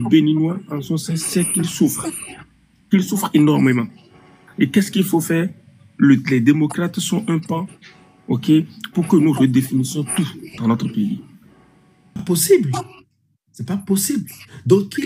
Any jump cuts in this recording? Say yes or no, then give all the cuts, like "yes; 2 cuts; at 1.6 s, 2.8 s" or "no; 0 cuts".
yes; 1 cut; at 12.2 s